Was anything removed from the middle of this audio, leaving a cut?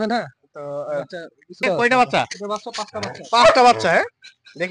yes; 1 cut; at 1.6 s

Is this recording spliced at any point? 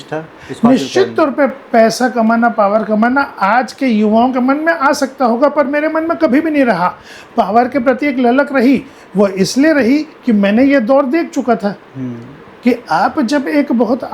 no; 0 cuts

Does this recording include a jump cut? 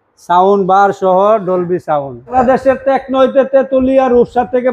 yes; 1 cut; at 2.3 s

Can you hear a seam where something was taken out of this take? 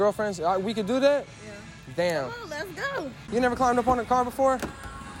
yes; 1 cut; at 3.2 s

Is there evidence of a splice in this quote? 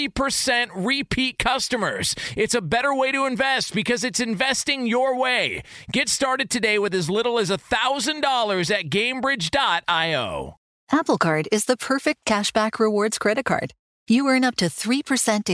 yes; 1 cut; at 10.6 s

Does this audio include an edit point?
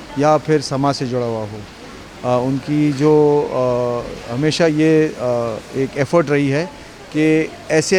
no; 0 cuts

